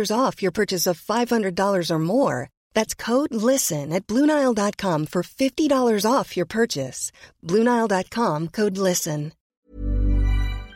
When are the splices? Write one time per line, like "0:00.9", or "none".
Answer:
0:09.5